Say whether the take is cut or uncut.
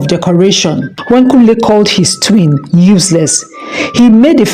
cut